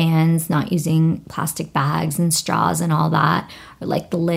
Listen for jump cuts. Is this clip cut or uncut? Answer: uncut